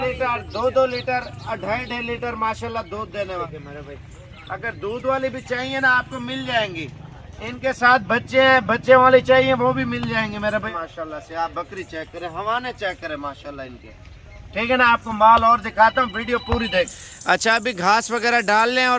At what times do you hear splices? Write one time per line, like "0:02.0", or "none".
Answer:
0:03.4
0:10.7
0:17.0